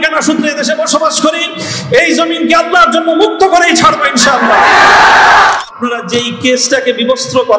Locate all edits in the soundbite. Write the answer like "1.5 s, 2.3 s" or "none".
5.6 s